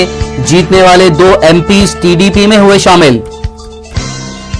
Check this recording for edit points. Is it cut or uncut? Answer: uncut